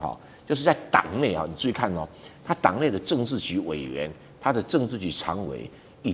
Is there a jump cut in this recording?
no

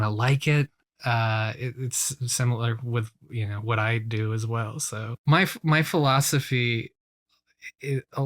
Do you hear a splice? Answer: yes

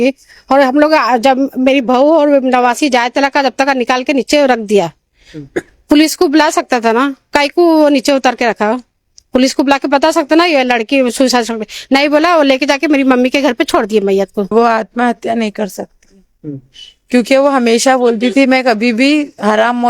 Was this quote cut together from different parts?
yes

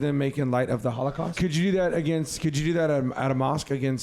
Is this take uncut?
no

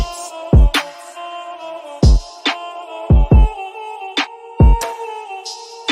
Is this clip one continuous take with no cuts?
yes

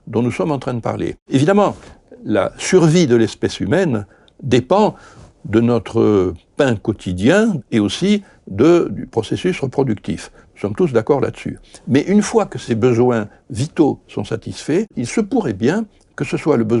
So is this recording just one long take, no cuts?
no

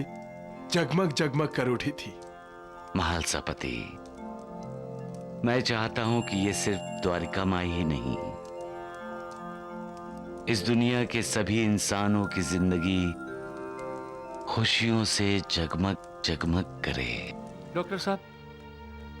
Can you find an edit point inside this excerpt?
yes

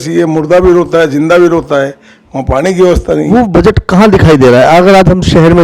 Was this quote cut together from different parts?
yes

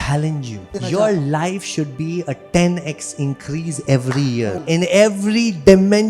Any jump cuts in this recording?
yes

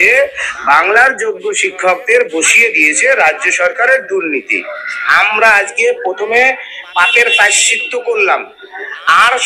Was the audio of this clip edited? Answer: yes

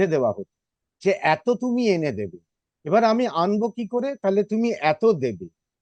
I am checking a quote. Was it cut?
no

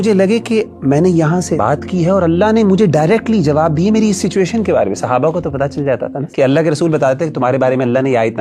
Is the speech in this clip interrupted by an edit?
yes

